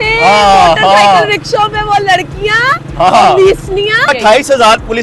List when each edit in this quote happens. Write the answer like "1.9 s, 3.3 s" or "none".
4.1 s